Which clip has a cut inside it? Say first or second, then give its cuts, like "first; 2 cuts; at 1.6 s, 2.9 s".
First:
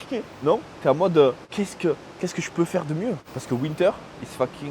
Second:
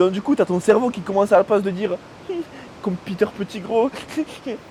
first; 2 cuts; at 1.4 s, 3.3 s